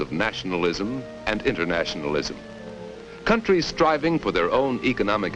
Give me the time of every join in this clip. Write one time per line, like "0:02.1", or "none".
none